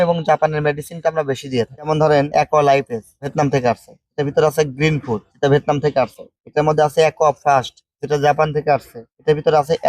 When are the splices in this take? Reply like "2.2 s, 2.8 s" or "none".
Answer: 2.1 s